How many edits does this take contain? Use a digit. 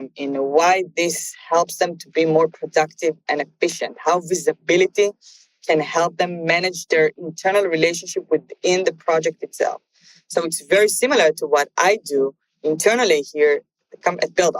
0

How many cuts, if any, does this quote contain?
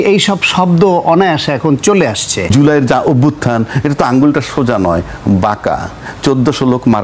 1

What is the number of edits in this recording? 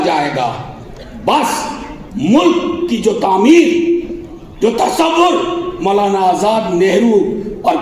0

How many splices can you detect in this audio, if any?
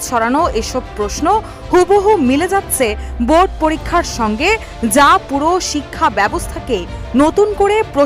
0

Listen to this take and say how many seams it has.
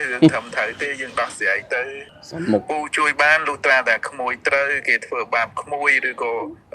0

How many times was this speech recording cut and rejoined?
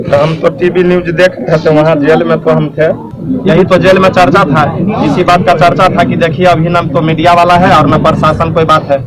1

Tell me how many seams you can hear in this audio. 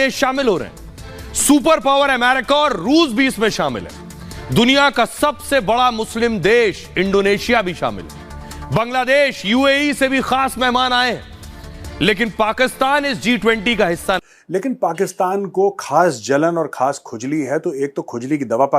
1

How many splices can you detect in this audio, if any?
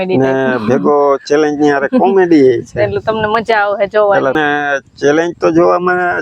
1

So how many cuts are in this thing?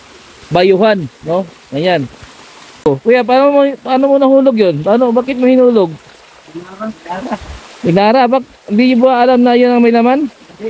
1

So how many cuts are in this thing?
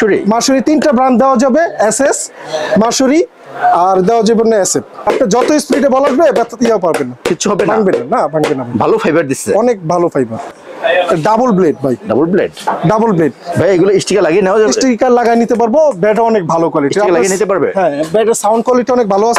2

